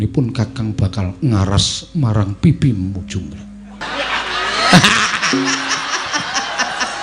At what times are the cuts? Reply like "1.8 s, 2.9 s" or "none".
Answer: 3.8 s